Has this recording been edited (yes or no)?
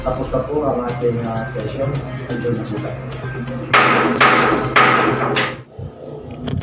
yes